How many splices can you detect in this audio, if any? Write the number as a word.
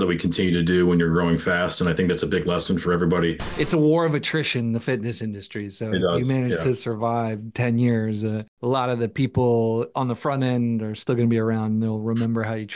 two